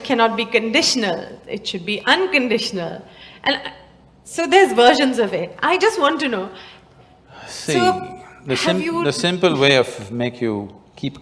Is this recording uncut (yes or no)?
yes